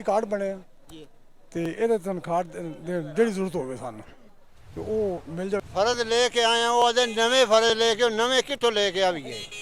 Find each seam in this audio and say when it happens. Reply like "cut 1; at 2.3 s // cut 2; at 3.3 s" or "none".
cut 1; at 5.6 s